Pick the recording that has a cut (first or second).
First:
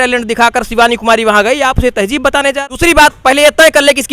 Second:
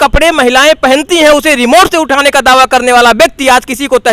first